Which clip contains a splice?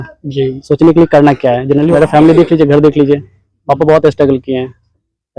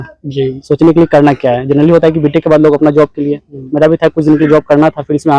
first; 1 cut; at 1.9 s

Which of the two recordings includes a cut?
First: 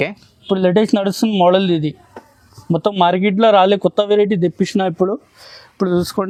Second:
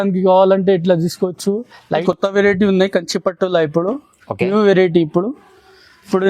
second; 1 cut; at 2.0 s

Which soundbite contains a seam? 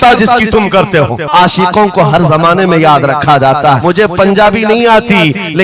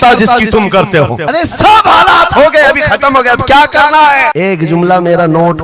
first; 2 cuts; at 1.3 s, 3.8 s

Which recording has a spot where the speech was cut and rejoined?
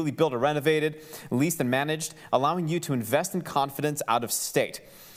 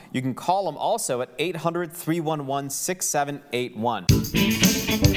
second; 1 cut; at 4.0 s

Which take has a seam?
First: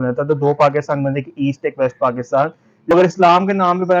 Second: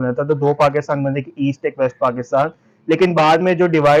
first; 1 cut; at 2.9 s

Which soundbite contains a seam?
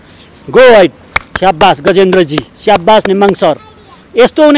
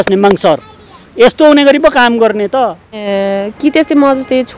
second; 1 cut; at 3.0 s

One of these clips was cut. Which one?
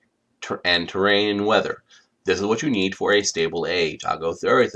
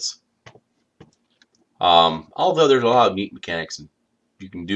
first; 1 cut; at 0.9 s

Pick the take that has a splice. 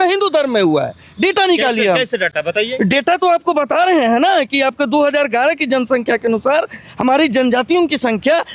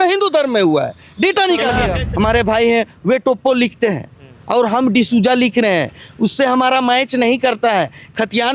second; 1 cut; at 2.0 s

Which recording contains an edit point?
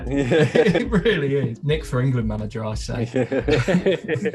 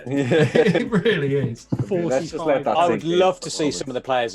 first; 1 cut; at 1.6 s

